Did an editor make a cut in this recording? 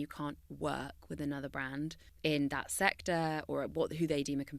yes; 1 cut; at 2.0 s

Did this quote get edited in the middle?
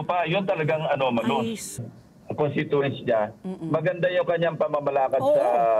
yes; 1 cut; at 1.8 s

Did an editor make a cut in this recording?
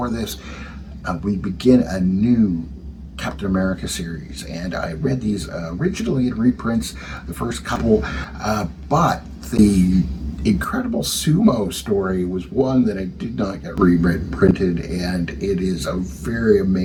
no; 0 cuts

